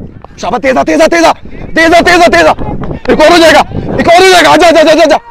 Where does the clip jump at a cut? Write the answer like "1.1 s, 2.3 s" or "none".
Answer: none